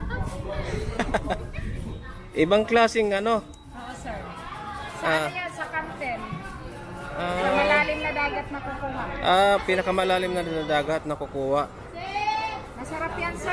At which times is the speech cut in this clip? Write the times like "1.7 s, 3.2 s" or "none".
none